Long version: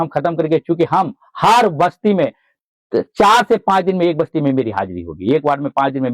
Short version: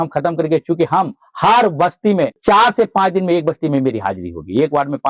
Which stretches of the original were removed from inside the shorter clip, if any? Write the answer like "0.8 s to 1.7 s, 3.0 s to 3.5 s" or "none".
2.4 s to 3.1 s